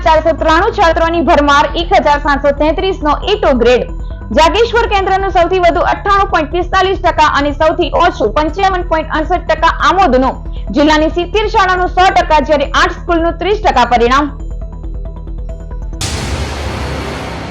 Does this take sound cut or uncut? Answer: cut